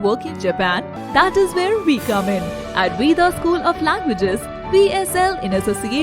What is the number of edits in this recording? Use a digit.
1